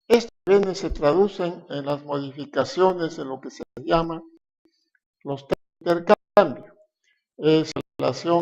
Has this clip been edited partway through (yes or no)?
no